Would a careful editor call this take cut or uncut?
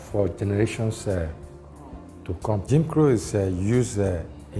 cut